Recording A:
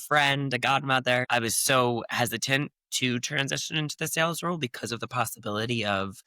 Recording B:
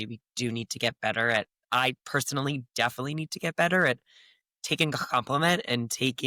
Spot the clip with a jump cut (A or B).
A